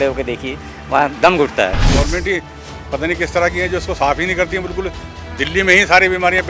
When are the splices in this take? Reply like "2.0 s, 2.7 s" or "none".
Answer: 1.9 s